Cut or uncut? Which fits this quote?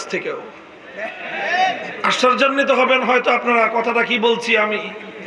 uncut